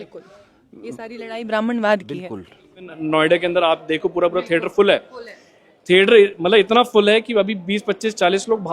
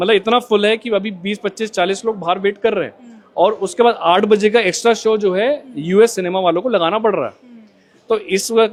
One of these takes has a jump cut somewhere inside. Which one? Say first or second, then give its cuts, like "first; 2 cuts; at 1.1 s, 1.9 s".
first; 1 cut; at 3.0 s